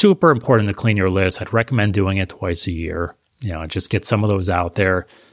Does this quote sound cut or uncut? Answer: uncut